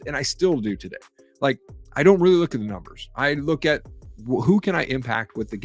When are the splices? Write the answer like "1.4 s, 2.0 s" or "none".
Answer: none